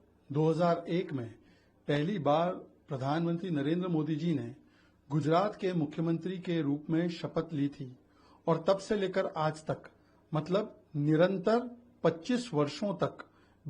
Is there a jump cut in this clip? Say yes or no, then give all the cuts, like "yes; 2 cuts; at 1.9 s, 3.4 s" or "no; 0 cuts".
no; 0 cuts